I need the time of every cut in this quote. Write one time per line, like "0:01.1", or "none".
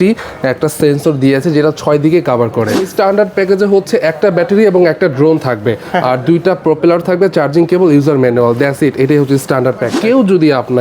0:02.9
0:09.9